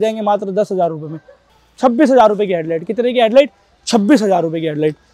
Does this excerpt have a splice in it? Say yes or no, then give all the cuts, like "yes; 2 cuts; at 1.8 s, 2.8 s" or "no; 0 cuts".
yes; 1 cut; at 1.5 s